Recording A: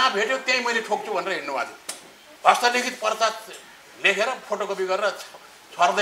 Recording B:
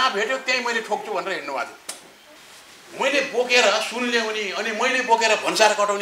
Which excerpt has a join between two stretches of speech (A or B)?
B